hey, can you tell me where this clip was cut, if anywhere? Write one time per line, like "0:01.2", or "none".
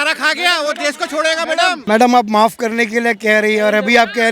0:01.8